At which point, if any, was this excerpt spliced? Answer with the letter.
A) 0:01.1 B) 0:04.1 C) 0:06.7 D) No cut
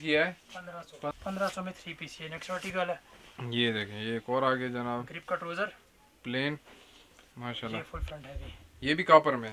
A